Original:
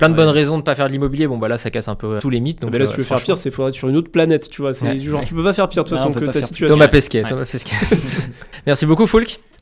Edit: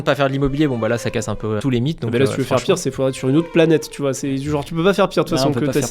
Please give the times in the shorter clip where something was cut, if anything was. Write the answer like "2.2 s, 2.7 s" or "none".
none